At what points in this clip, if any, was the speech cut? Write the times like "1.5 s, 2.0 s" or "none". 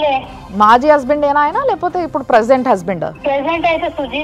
3.2 s

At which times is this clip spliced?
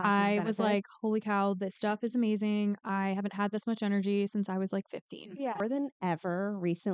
5.6 s

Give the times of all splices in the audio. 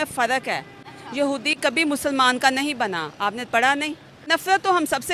4.1 s

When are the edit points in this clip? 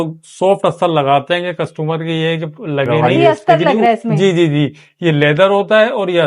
2.9 s

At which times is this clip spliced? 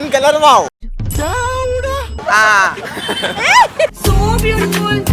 3.9 s

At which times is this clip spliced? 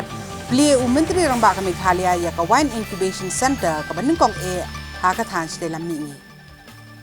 6.1 s

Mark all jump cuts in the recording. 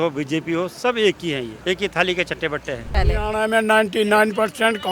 1.5 s, 2.9 s

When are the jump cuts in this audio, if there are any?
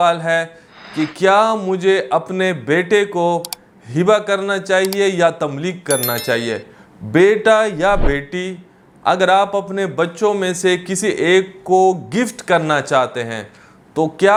none

